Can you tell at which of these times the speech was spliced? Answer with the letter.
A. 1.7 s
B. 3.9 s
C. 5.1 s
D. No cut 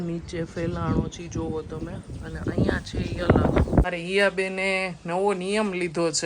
B